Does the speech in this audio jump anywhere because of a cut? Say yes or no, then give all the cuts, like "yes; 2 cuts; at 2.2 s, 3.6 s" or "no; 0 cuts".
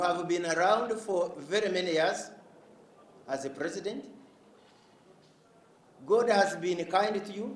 no; 0 cuts